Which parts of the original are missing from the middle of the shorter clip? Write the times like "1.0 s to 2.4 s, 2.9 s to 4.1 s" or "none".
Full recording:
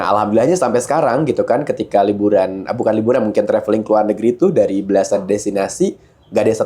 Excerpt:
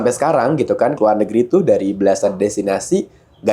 1.6 s to 3.8 s